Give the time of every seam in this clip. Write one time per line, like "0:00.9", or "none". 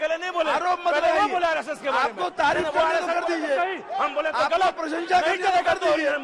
none